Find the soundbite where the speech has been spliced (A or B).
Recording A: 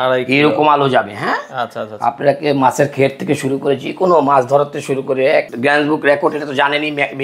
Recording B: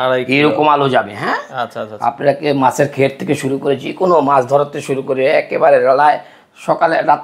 A